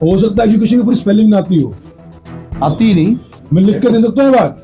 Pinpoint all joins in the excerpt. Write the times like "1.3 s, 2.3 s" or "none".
none

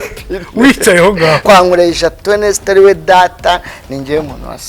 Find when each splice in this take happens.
1.4 s

